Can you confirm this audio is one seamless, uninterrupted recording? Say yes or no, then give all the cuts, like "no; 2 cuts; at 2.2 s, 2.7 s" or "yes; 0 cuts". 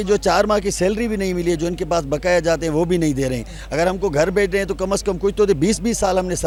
yes; 0 cuts